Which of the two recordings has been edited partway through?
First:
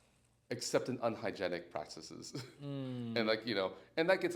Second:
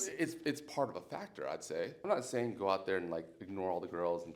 second; 1 cut; at 2.1 s

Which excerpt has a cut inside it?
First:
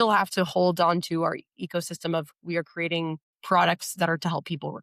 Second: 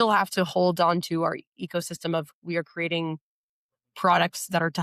first; 1 cut; at 3.3 s

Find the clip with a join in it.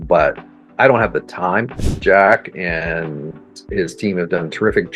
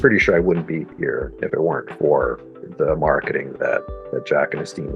first; 1 cut; at 1.7 s

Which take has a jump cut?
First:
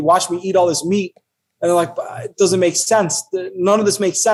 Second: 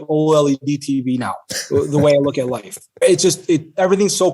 second; 1 cut; at 3.0 s

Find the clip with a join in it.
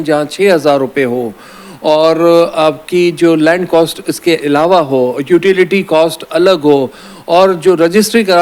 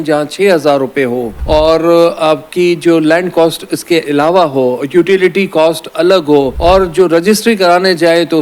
second; 2 cuts; at 1.3 s, 6.5 s

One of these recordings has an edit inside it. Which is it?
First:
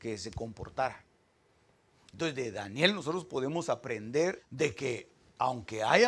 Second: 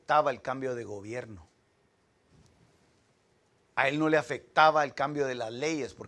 first; 1 cut; at 4.5 s

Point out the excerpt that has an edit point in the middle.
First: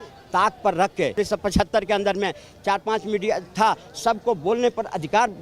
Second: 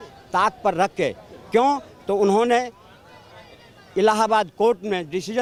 first; 1 cut; at 1.2 s

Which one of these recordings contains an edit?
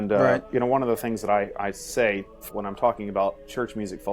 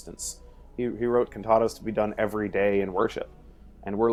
first; 1 cut; at 2.5 s

